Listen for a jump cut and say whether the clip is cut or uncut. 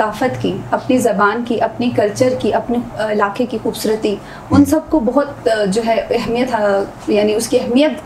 uncut